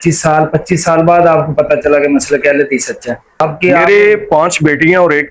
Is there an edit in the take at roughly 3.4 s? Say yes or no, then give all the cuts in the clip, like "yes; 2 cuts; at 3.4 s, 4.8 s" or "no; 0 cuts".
yes; 1 cut; at 3.4 s